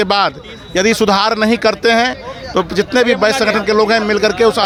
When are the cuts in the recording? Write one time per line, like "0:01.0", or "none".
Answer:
none